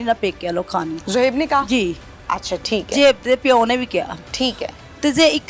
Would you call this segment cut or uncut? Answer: uncut